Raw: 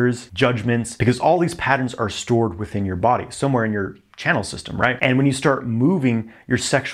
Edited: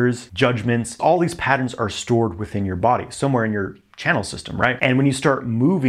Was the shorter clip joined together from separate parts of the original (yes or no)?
yes